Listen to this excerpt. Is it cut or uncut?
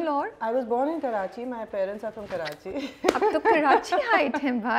uncut